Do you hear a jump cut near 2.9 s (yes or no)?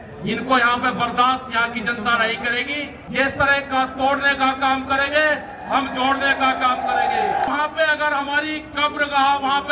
yes